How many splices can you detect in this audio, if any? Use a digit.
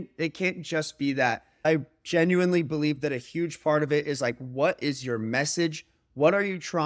1